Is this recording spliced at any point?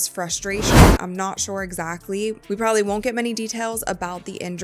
no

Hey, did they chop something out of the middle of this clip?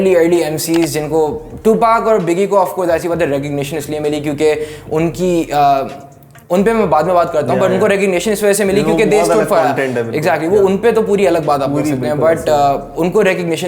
no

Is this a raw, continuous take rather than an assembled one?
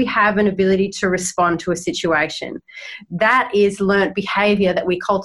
yes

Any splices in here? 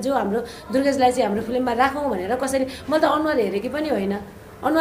no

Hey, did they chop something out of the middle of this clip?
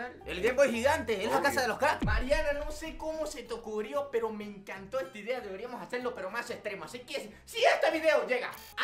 yes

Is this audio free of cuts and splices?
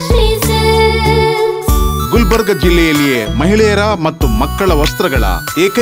yes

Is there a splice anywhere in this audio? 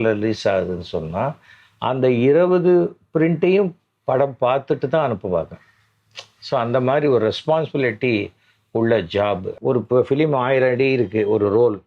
yes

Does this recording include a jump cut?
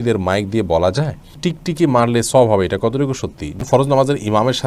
yes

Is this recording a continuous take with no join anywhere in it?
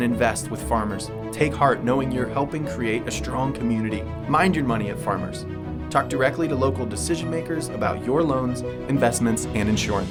yes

